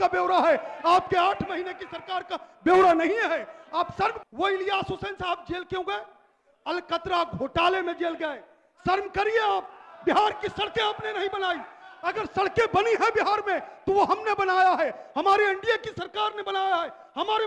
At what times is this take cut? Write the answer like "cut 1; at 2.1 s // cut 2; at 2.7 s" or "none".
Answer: cut 1; at 4.2 s